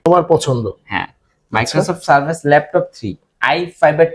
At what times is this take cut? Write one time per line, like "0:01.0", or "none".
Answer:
none